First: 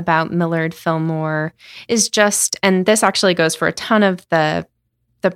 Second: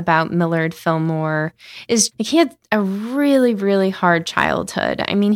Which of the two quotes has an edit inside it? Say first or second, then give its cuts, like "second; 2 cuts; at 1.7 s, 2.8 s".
second; 1 cut; at 2.1 s